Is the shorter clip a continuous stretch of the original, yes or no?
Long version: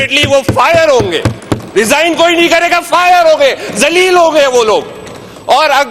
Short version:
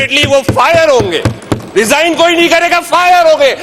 yes